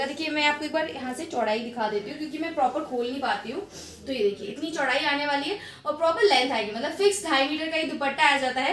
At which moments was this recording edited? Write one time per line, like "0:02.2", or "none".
none

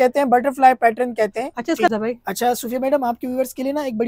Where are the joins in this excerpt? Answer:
0:01.9

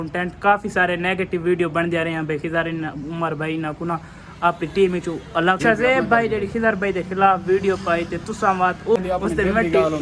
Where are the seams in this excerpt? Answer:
0:05.6
0:09.0

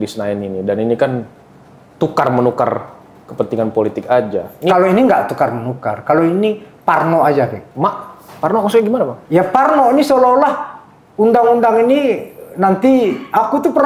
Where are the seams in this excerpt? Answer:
none

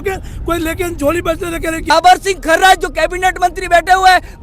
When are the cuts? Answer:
0:01.8

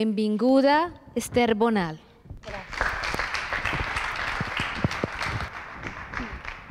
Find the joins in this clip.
0:04.6

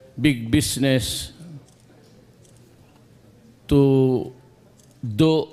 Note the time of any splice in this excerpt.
0:03.9

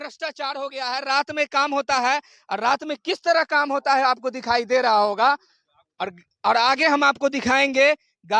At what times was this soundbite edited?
none

